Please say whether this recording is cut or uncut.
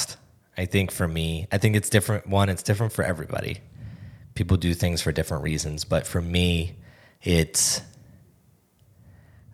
uncut